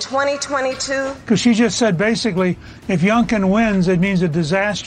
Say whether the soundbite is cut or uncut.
cut